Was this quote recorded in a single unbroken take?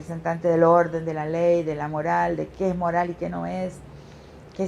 yes; 0 cuts

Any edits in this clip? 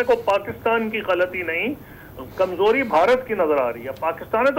no; 0 cuts

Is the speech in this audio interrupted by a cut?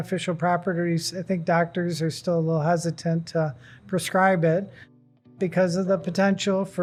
no; 0 cuts

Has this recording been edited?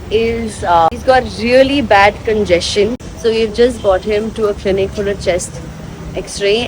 yes; 2 cuts; at 0.9 s, 3.1 s

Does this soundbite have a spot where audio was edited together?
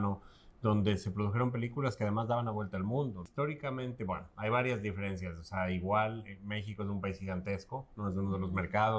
yes; 1 cut; at 3.2 s

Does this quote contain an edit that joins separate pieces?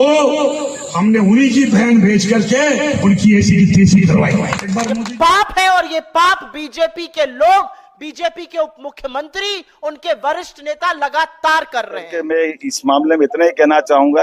yes; 2 cuts; at 5.0 s, 12.1 s

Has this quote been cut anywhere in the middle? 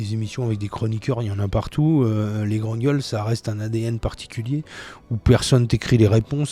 no; 0 cuts

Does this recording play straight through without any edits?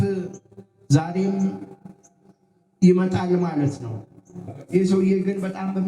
no; 1 cut; at 4.5 s

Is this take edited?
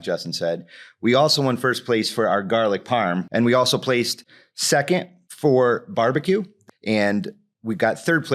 yes; 3 cuts; at 3.2 s, 5.2 s, 6.5 s

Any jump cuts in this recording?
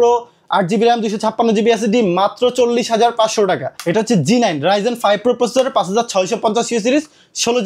yes; 1 cut; at 3.7 s

